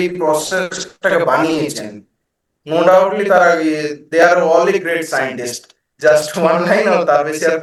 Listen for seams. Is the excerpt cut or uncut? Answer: uncut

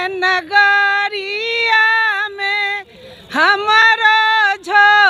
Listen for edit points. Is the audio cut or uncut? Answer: uncut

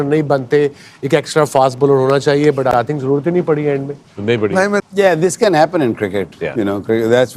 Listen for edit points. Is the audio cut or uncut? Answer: uncut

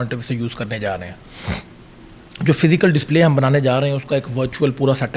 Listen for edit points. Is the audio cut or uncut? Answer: uncut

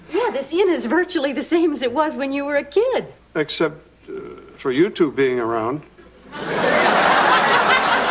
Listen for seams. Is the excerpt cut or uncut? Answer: uncut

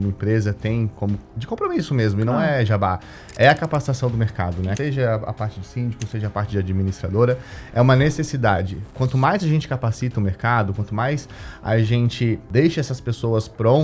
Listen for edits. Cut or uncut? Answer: cut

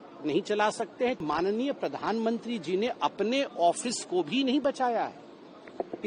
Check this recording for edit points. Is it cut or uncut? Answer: cut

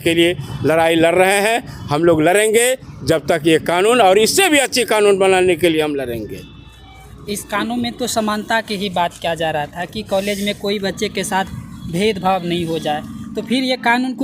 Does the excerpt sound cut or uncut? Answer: uncut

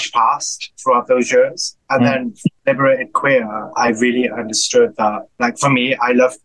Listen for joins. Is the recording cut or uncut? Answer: cut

